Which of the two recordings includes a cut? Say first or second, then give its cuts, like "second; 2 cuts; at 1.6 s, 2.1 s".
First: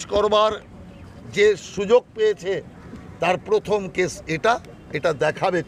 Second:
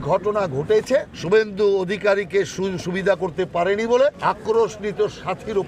second; 2 cuts; at 1.1 s, 4.2 s